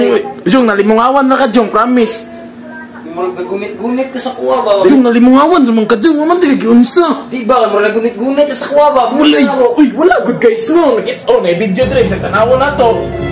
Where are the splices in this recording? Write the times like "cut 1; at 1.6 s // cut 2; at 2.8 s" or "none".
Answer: cut 1; at 4.9 s